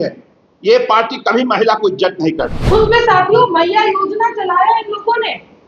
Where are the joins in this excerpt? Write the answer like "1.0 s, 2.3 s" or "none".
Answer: 2.6 s